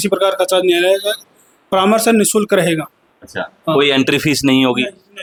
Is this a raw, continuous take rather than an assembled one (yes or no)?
yes